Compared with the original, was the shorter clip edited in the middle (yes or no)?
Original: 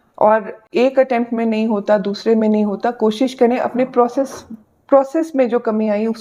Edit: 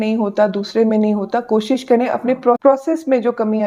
yes